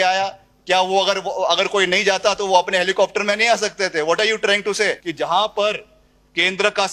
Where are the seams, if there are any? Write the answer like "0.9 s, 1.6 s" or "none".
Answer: 5.0 s